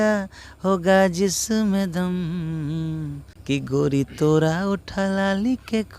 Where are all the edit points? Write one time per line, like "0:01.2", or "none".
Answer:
0:03.3